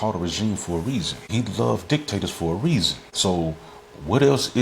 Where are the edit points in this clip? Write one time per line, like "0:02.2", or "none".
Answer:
0:01.2
0:03.0